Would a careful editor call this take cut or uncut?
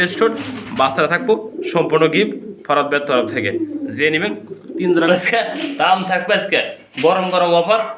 cut